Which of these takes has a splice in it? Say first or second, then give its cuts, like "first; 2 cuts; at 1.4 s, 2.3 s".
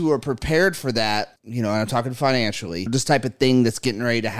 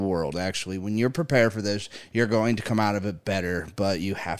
first; 2 cuts; at 1.4 s, 2.9 s